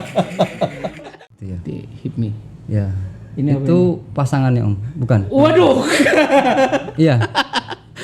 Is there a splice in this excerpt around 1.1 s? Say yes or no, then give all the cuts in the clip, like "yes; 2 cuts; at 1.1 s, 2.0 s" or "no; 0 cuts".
yes; 1 cut; at 1.1 s